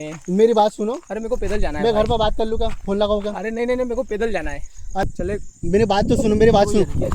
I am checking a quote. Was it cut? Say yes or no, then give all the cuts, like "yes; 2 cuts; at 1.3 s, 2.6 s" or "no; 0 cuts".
yes; 1 cut; at 5.0 s